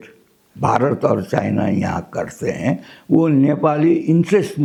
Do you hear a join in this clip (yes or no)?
no